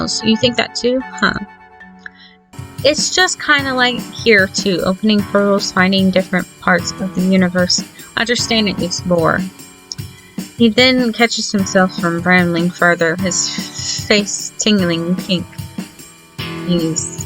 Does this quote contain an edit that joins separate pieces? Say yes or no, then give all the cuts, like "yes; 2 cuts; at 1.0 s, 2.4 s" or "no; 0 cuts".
yes; 1 cut; at 2.6 s